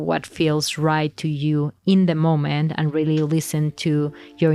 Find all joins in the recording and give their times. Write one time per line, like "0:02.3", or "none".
none